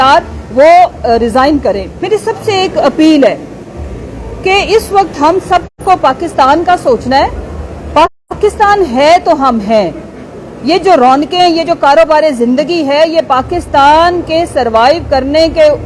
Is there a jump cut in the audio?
yes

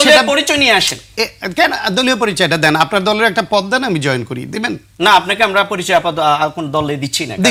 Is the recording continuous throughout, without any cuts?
yes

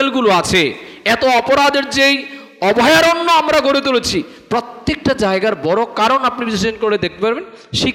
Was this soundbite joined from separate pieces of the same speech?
no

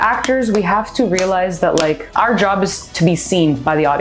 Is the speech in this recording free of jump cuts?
no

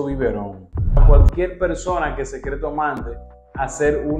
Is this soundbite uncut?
no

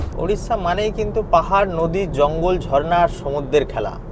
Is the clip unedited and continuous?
yes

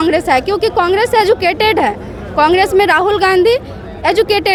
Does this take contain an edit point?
no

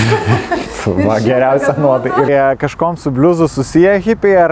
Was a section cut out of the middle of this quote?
yes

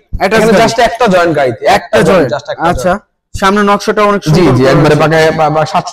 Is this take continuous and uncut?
yes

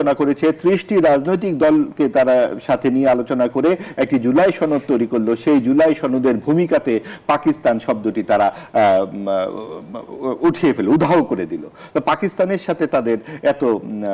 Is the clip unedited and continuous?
yes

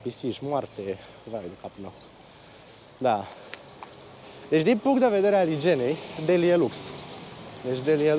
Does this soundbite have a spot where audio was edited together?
no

